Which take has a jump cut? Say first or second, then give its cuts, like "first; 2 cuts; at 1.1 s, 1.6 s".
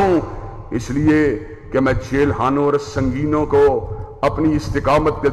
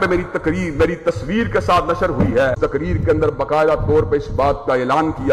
second; 1 cut; at 2.6 s